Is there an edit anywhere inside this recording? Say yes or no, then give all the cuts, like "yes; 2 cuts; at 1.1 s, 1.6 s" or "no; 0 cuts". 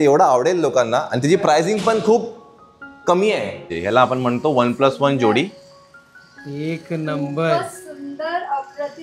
yes; 1 cut; at 3.7 s